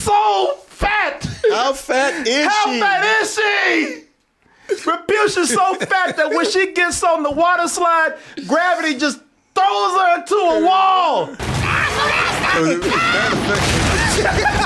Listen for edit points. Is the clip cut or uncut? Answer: cut